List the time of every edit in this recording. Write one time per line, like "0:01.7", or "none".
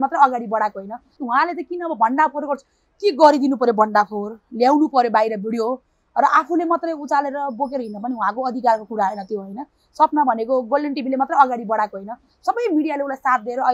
0:01.1